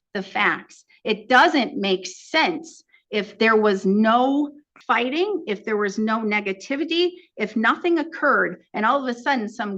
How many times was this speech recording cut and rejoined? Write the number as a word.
one